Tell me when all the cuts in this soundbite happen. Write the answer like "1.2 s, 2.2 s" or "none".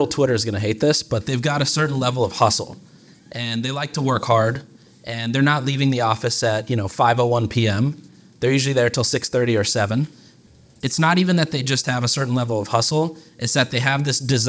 10.3 s